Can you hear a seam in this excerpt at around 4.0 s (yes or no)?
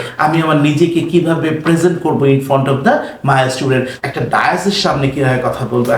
yes